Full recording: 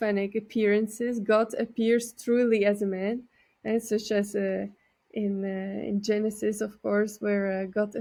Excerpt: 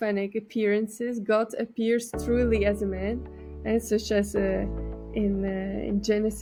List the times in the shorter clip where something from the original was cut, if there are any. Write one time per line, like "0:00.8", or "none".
none